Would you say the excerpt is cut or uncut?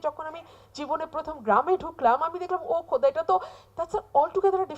uncut